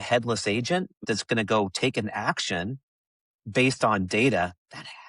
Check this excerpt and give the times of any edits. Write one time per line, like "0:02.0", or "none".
0:01.0